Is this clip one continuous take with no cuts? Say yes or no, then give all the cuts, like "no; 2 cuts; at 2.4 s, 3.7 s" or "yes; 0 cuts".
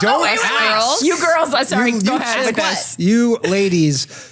yes; 0 cuts